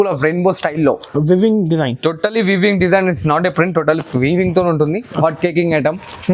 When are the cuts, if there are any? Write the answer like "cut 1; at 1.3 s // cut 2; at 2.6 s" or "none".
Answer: cut 1; at 5.2 s

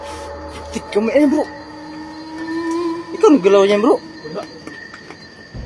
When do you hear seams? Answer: cut 1; at 1.6 s // cut 2; at 3.1 s

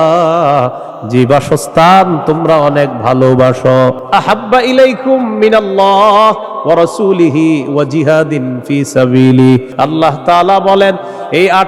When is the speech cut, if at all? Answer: cut 1; at 4.0 s // cut 2; at 9.7 s

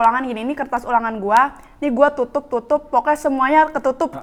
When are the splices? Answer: none

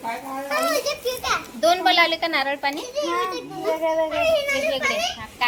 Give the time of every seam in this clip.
none

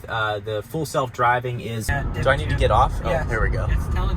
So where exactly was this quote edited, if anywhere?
cut 1; at 1.8 s

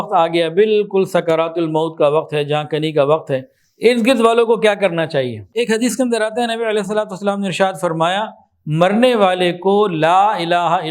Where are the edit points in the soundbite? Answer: cut 1; at 5.4 s

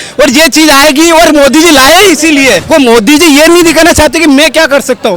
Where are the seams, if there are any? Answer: cut 1; at 2.6 s

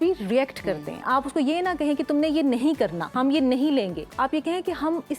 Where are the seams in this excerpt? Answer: cut 1; at 1.0 s // cut 2; at 3.1 s // cut 3; at 4.0 s

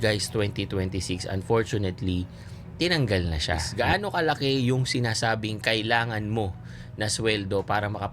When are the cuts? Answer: cut 1; at 3.7 s

